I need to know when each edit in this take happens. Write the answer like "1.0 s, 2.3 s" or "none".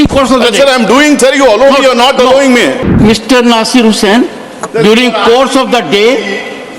2.9 s